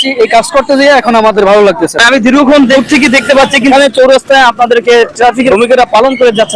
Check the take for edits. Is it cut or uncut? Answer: cut